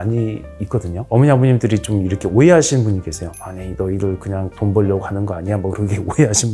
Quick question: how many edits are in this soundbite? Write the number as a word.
one